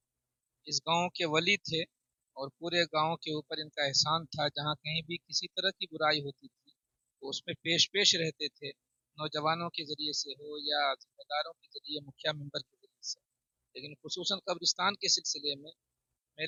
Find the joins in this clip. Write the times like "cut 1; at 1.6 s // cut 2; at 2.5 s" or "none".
none